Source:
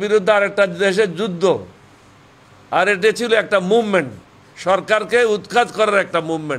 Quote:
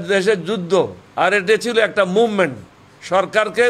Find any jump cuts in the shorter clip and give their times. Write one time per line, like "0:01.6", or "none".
0:01.0